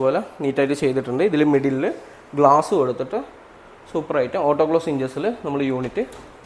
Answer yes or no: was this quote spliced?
no